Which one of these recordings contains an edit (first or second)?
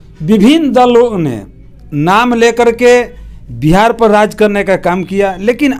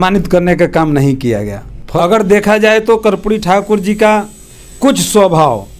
second